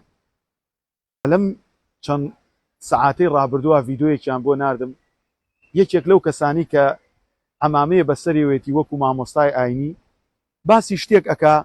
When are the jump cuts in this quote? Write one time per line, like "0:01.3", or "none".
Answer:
0:01.2